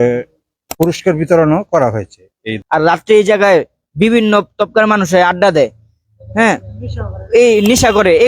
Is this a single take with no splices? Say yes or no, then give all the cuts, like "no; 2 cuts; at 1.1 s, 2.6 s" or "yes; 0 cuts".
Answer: no; 1 cut; at 2.5 s